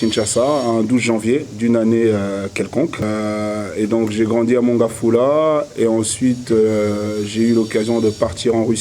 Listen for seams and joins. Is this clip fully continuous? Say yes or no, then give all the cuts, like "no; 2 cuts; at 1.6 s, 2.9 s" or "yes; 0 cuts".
no; 1 cut; at 3.1 s